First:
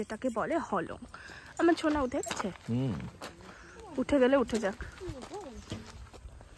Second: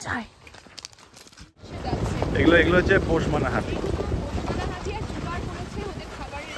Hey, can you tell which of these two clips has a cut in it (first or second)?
second